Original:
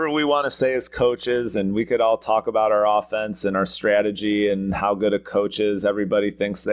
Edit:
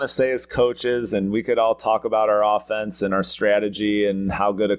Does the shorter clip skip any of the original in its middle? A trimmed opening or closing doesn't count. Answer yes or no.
no